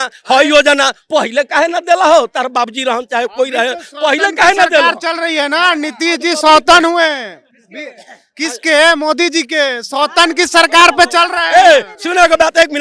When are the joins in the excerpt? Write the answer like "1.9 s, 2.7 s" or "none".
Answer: none